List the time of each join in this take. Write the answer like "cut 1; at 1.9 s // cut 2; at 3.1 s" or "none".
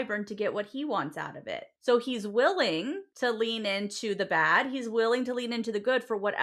cut 1; at 1.7 s // cut 2; at 3.1 s